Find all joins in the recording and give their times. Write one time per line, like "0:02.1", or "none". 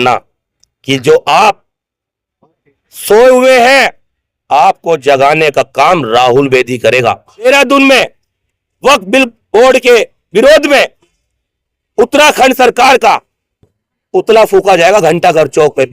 0:07.4